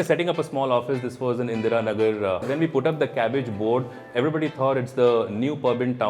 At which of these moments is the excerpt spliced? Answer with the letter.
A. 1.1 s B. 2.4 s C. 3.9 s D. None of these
B